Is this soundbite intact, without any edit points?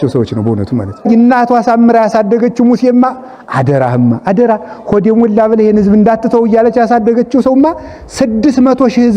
no; 1 cut; at 1.1 s

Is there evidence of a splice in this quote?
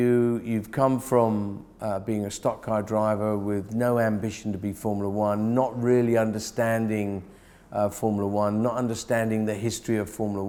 no; 0 cuts

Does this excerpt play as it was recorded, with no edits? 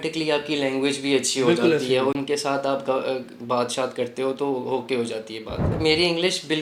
yes; 0 cuts

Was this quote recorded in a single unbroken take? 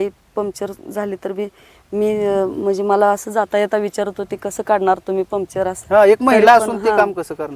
yes; 0 cuts

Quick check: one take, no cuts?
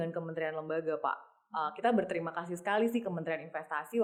yes; 0 cuts

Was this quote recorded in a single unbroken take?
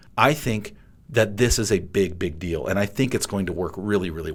yes; 0 cuts

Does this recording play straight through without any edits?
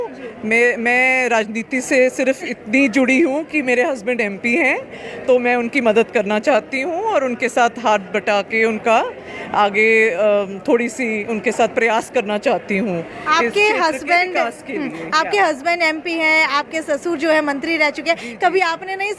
yes; 0 cuts

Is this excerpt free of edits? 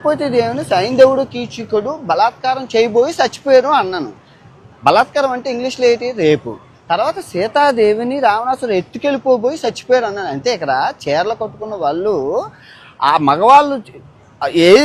yes; 0 cuts

